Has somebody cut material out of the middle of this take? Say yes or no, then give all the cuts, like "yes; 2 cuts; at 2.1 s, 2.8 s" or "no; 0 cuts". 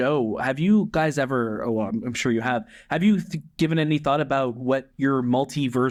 no; 0 cuts